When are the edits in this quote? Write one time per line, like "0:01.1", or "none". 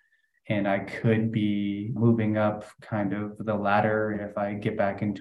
0:01.9